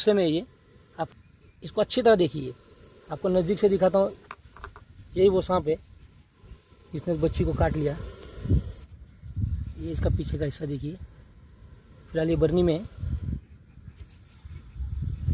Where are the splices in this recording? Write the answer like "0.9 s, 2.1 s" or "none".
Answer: 1.1 s